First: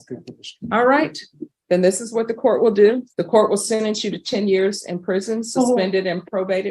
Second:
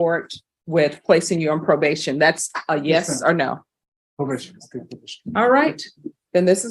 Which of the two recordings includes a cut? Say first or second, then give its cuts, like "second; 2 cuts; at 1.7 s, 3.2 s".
first; 1 cut; at 3.1 s